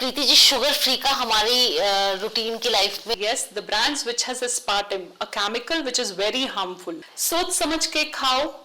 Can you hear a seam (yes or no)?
yes